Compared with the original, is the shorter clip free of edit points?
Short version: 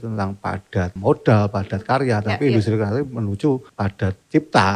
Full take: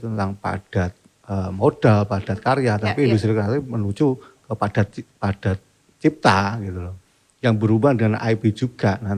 no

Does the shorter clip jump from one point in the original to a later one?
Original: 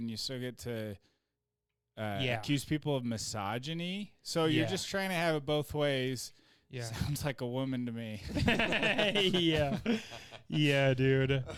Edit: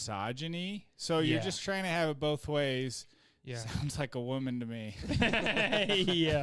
no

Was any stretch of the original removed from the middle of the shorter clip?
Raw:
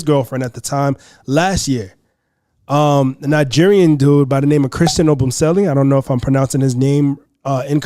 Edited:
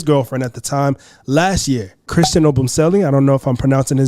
yes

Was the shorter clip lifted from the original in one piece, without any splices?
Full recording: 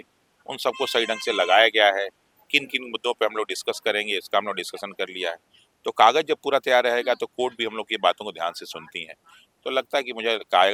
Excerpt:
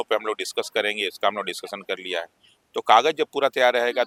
yes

